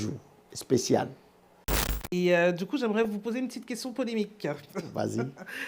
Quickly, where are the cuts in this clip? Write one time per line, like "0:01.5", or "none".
0:01.9